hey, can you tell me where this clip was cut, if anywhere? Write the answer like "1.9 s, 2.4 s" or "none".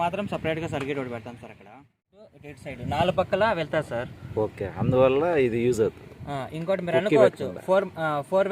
2.3 s